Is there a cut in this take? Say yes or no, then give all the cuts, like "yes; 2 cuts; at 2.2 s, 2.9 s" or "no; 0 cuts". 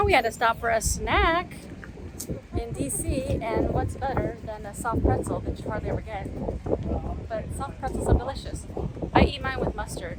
no; 0 cuts